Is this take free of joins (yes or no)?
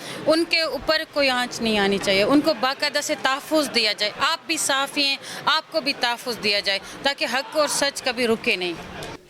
yes